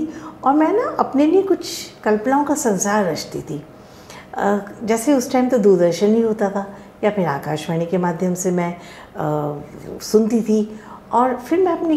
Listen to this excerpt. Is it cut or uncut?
uncut